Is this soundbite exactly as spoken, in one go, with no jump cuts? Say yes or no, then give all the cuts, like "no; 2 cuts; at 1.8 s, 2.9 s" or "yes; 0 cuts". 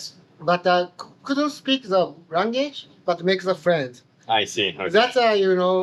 yes; 0 cuts